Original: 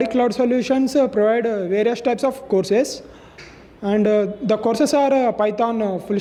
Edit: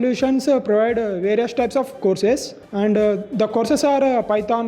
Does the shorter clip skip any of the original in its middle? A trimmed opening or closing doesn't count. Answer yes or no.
yes